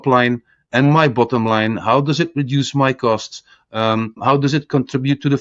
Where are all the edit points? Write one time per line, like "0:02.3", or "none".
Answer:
0:04.2